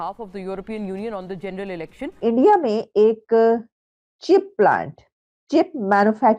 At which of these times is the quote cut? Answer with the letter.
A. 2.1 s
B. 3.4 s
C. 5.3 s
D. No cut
A